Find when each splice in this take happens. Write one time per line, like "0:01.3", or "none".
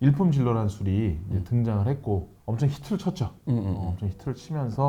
0:02.4